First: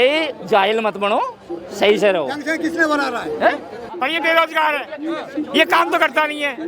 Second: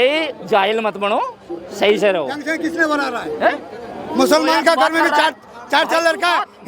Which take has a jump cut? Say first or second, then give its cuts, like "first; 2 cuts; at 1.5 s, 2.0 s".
first; 1 cut; at 3.8 s